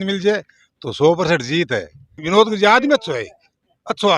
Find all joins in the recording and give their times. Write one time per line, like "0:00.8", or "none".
0:02.2